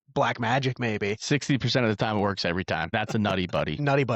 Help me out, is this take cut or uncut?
cut